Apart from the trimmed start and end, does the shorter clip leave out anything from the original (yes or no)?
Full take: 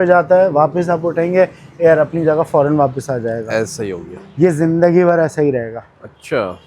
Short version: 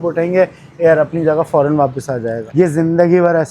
yes